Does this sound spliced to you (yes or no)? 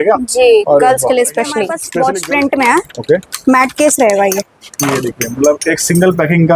yes